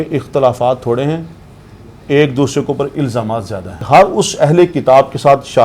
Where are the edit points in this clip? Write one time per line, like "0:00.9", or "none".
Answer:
0:03.8